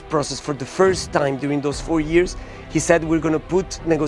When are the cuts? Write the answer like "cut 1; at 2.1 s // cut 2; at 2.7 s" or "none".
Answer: none